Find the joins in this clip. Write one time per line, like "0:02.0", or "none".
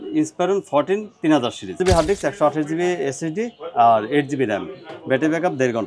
0:01.7